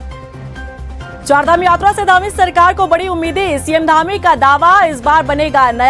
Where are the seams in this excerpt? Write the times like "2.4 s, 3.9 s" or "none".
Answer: none